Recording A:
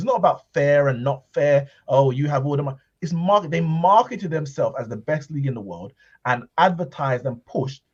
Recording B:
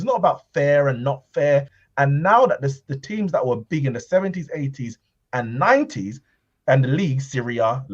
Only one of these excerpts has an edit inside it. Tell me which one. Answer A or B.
B